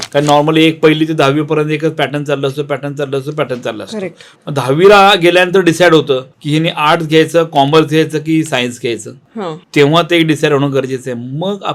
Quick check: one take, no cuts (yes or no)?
yes